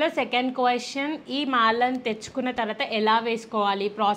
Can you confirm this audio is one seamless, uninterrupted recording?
yes; 0 cuts

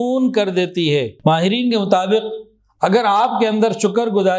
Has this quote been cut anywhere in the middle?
yes; 1 cut; at 1.1 s

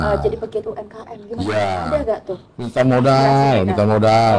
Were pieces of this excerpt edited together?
no; 0 cuts

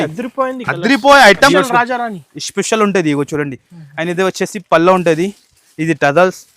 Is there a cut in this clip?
yes; 1 cut; at 1.5 s

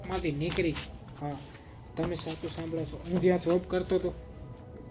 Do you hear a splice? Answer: no; 0 cuts

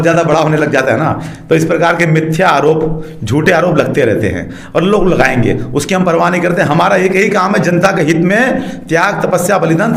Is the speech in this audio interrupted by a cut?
no; 0 cuts

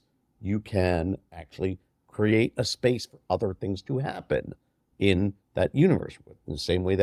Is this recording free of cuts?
yes; 0 cuts

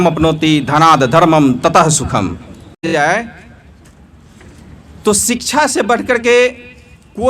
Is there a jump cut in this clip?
yes; 1 cut; at 3.0 s

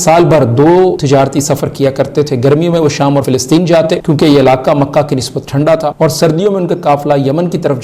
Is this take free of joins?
no; 3 cuts; at 1.0 s, 3.6 s, 5.9 s

